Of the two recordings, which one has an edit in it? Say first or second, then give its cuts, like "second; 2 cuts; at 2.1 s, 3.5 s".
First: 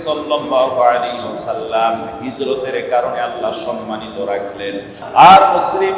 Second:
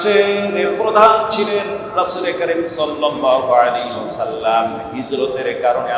first; 1 cut; at 4.9 s